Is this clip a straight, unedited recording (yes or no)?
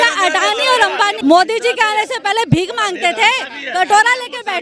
no